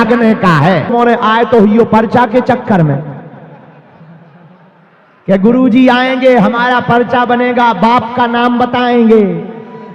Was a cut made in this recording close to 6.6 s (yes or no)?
no